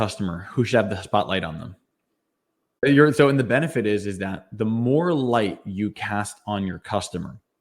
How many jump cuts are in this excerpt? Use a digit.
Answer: 1